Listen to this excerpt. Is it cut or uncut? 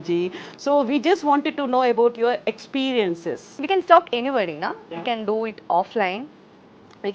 cut